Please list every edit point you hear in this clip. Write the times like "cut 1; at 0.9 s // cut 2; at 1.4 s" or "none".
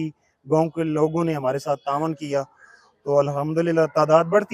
none